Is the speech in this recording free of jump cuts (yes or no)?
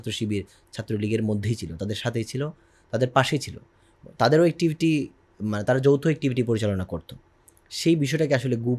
yes